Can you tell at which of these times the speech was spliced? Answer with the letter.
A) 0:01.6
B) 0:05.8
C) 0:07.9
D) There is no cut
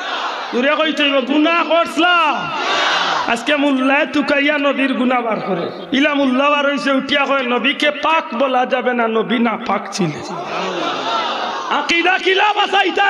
B